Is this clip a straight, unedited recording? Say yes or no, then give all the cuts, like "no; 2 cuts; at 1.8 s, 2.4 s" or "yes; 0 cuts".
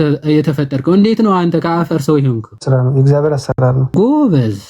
no; 2 cuts; at 2.5 s, 3.9 s